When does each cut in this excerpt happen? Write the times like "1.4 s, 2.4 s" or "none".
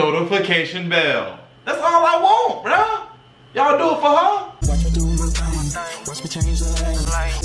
4.6 s